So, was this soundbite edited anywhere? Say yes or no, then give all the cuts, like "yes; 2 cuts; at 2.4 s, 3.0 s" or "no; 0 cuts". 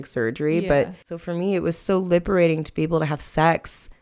yes; 1 cut; at 1.2 s